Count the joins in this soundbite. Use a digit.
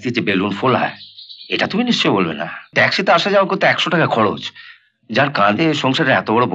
1